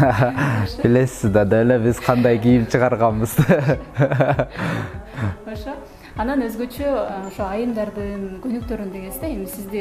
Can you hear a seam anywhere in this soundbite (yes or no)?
no